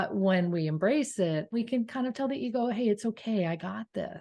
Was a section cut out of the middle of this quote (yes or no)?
yes